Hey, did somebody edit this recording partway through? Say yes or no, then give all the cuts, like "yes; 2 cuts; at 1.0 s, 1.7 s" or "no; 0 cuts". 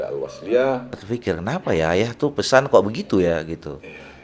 yes; 1 cut; at 1.0 s